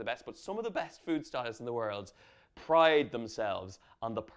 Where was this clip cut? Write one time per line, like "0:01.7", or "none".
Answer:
none